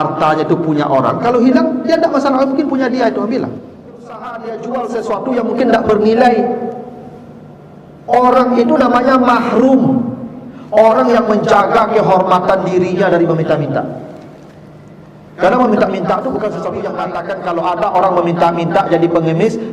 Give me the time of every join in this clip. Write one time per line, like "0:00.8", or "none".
0:04.3
0:17.0